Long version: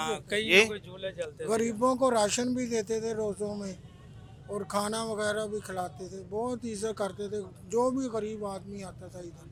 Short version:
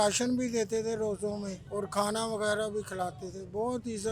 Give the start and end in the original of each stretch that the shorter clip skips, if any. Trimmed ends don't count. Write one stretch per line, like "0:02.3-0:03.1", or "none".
0:03.8-0:04.4